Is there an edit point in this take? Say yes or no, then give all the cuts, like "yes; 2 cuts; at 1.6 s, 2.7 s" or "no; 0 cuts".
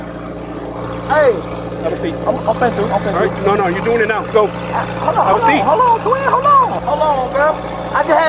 yes; 1 cut; at 6.8 s